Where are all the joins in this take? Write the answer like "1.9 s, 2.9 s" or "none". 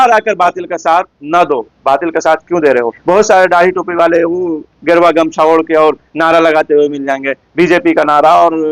3.0 s